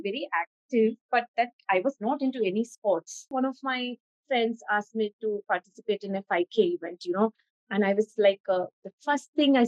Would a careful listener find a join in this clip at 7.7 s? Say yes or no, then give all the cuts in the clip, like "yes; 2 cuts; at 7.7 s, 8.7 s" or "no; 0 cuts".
no; 1 cut; at 3.3 s